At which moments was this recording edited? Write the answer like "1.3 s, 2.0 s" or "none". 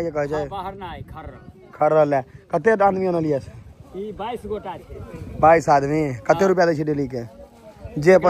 none